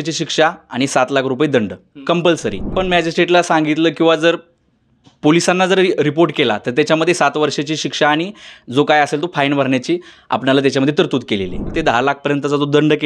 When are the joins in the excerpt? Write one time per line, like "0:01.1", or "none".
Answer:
0:02.7
0:11.7